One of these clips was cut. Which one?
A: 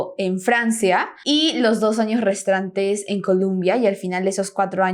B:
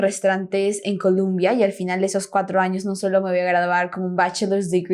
A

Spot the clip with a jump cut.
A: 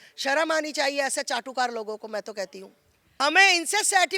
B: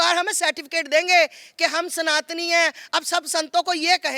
A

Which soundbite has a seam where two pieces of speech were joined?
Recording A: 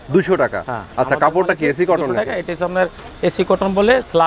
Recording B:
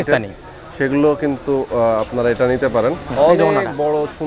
B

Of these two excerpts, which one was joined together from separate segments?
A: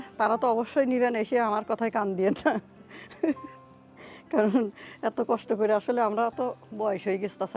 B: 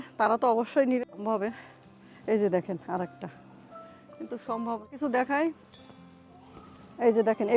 B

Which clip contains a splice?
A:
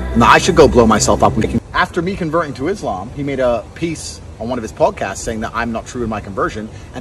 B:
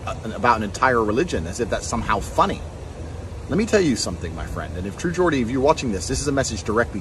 A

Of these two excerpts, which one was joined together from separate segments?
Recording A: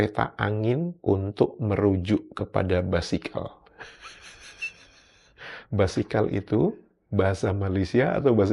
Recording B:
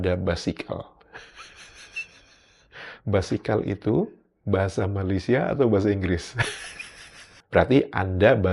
B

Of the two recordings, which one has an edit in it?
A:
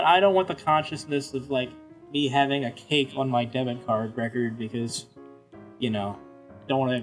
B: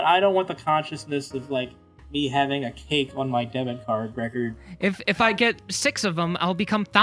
B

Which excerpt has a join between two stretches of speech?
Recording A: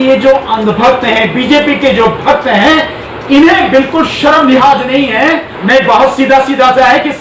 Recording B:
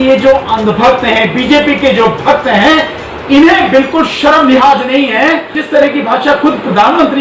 A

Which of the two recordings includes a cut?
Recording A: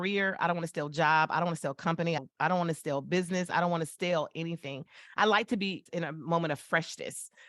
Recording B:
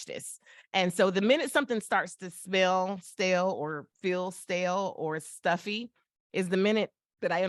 A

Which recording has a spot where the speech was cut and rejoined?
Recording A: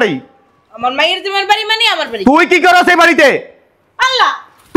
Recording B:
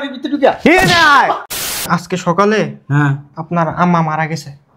B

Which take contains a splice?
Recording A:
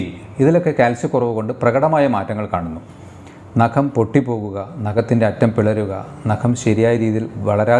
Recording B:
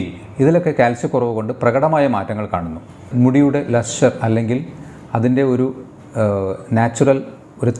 B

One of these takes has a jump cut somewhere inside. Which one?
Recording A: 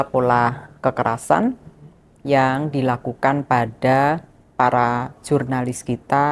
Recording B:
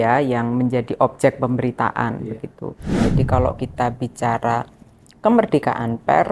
B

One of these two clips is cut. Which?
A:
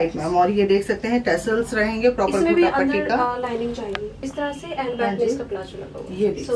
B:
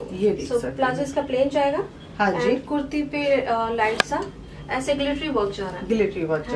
A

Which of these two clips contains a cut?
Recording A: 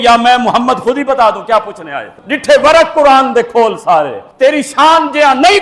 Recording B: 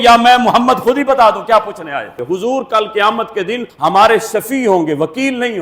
B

